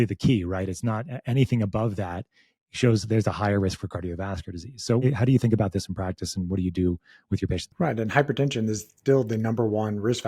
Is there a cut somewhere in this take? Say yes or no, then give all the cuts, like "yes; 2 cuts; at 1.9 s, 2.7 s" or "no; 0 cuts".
yes; 2 cuts; at 5.0 s, 7.7 s